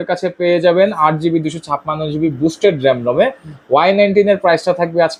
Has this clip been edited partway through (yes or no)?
no